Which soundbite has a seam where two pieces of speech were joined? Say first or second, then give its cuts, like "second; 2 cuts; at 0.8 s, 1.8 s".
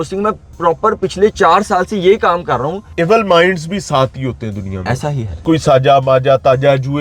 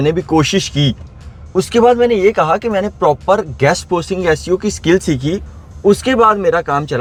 first; 2 cuts; at 2.8 s, 5.4 s